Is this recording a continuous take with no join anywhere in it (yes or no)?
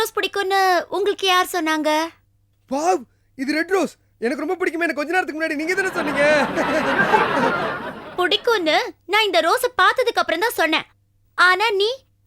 yes